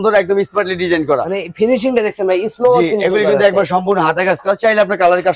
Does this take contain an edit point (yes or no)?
no